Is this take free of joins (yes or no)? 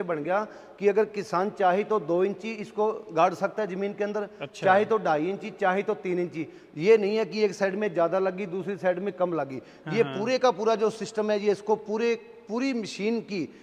yes